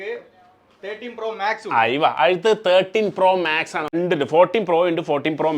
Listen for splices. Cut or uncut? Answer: cut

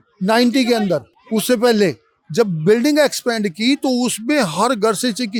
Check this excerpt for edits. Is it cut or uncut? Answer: uncut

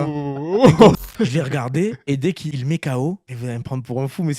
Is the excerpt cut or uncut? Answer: cut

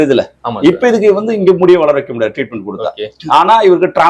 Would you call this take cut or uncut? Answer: uncut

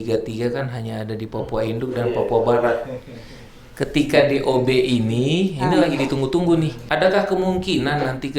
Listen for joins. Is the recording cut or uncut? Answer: cut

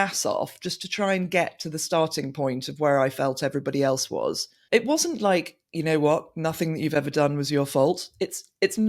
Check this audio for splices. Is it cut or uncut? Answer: cut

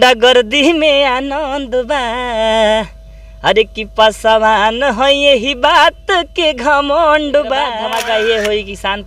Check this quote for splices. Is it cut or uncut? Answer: cut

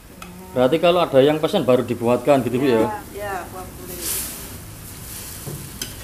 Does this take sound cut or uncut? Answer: cut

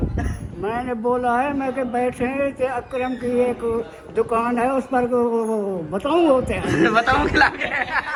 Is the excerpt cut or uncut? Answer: uncut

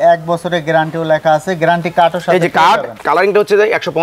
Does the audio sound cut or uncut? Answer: cut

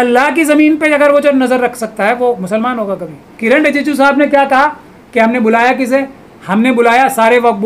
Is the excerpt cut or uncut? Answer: cut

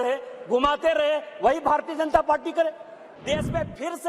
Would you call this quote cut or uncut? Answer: cut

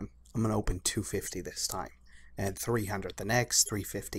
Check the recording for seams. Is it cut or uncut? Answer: cut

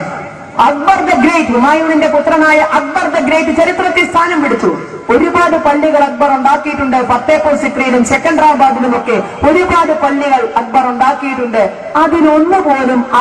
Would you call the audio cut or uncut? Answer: uncut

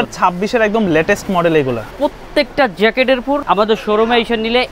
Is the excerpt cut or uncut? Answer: cut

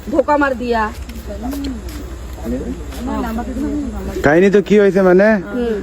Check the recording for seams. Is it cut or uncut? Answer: uncut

